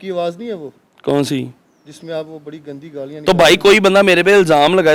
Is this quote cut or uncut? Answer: uncut